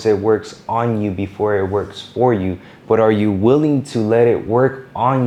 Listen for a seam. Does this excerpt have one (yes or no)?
no